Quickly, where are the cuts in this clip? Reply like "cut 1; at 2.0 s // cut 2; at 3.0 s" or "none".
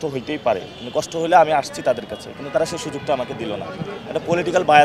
none